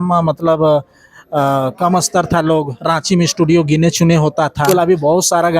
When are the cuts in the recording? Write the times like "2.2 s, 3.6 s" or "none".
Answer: 4.6 s

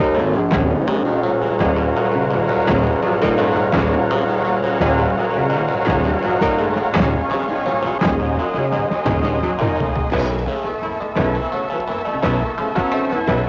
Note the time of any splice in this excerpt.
none

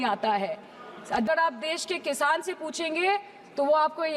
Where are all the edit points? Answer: 1.3 s

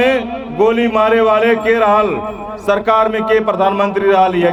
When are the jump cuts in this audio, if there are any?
none

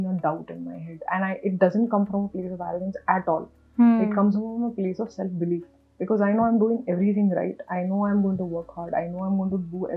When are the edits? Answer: none

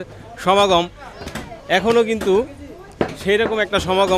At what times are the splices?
none

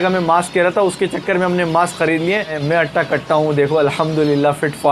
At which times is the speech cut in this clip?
2.6 s

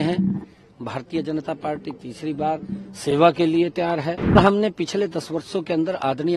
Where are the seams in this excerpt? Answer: 4.3 s

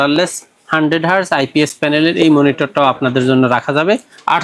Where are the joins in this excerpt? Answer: none

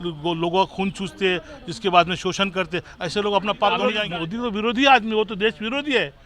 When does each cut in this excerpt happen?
4.0 s

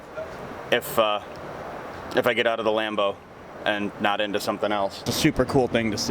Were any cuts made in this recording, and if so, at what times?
5.1 s

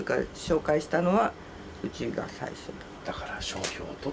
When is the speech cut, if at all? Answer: 2.9 s

